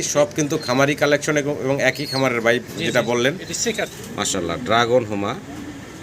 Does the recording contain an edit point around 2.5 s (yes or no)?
no